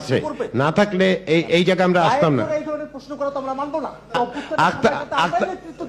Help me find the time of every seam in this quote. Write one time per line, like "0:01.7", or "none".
0:04.1

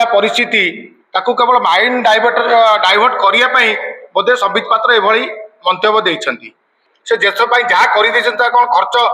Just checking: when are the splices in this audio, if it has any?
0:06.8

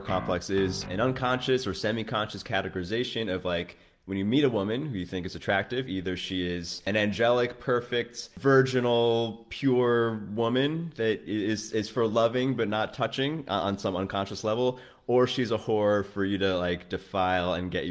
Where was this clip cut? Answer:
0:00.8
0:06.8
0:08.3

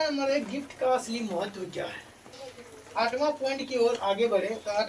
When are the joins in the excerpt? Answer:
0:02.4

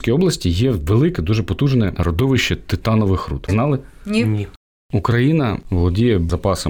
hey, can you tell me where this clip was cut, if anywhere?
0:02.0
0:03.4
0:04.6
0:05.6

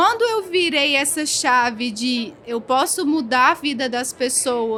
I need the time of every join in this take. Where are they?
none

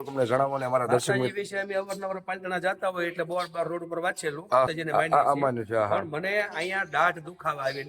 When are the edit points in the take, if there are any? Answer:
0:04.7

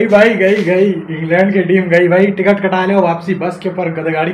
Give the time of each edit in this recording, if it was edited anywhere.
none

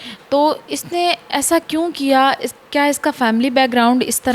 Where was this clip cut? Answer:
none

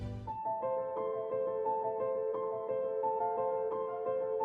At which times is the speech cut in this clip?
none

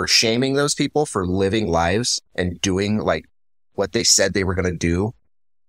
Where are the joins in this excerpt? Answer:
none

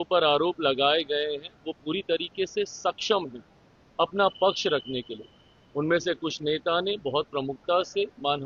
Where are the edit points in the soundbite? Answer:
none

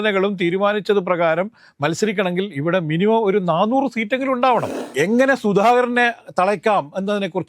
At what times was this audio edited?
0:04.8

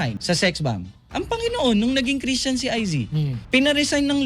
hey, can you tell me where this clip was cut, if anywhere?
0:03.4

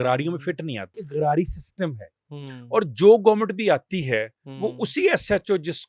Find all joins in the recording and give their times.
0:00.9

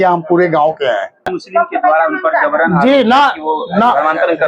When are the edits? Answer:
0:01.4

